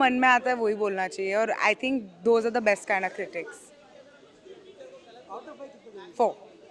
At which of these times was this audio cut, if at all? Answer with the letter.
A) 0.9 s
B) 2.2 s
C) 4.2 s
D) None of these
D